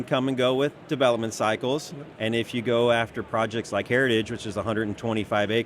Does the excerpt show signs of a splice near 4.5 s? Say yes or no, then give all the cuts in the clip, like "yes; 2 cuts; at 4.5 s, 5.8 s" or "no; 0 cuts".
no; 1 cut; at 2.1 s